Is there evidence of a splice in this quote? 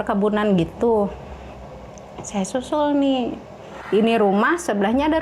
yes; 1 cut; at 3.7 s

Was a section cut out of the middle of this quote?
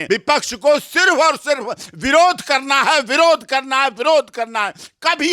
no; 0 cuts

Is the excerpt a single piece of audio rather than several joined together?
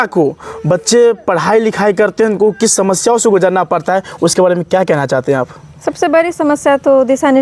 yes; 0 cuts

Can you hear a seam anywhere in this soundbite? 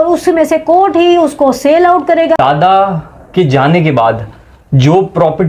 yes; 1 cut; at 2.0 s

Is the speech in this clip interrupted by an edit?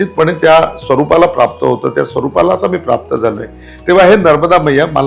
no; 0 cuts

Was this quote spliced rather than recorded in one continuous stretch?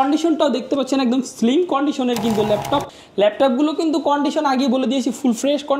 yes; 1 cut; at 2.9 s

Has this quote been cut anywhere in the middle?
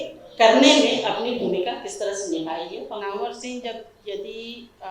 yes; 1 cut; at 2.8 s

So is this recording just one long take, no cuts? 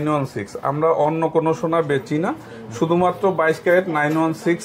yes; 0 cuts

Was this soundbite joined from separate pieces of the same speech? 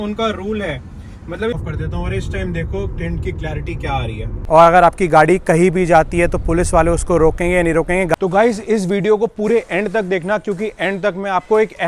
yes; 3 cuts; at 1.5 s, 4.3 s, 8.1 s

